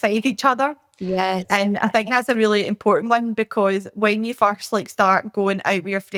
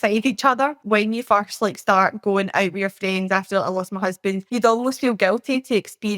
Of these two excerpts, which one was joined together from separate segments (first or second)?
second